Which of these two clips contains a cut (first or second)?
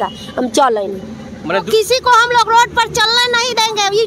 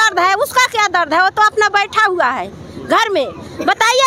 first